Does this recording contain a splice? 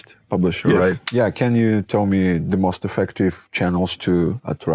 yes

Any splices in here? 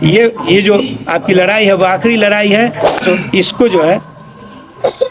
yes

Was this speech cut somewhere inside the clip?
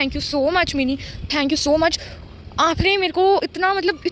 no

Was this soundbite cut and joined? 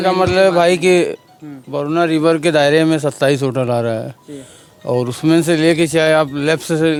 no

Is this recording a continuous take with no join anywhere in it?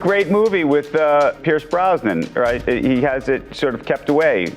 no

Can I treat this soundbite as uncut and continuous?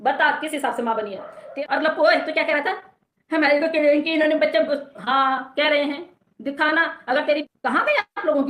no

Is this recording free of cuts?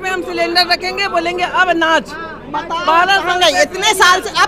yes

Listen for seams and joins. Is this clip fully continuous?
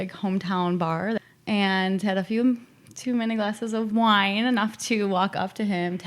no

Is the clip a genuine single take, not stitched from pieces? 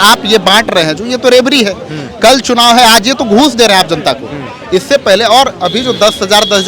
yes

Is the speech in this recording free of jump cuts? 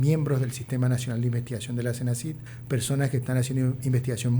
no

